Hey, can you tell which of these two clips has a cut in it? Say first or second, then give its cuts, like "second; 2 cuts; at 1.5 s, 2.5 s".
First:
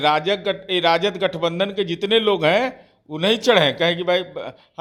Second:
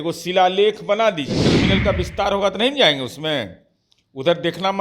second; 1 cut; at 1.5 s